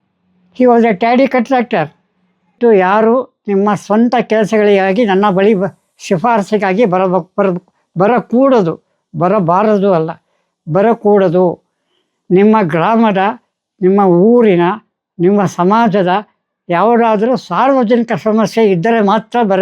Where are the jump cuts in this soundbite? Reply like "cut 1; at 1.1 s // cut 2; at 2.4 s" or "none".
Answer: cut 1; at 2.5 s